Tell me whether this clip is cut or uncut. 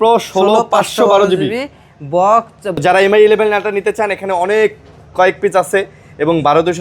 cut